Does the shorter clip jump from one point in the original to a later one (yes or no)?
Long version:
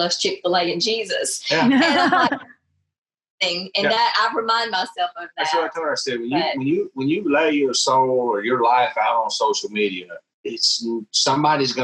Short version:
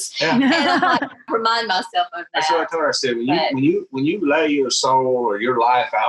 yes